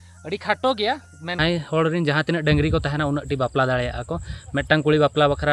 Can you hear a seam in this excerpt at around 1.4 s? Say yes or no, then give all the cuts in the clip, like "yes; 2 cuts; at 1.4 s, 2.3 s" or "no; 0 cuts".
yes; 1 cut; at 1.4 s